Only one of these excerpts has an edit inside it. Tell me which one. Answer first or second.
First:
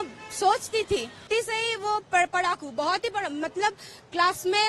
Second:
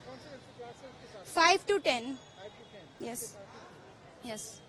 first